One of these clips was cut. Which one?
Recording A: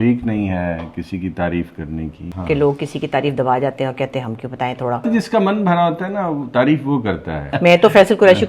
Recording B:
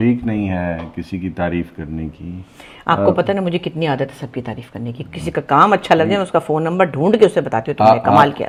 A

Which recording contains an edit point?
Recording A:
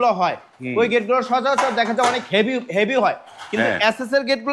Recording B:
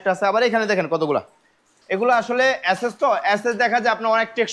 B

